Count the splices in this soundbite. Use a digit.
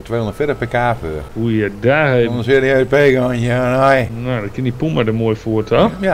2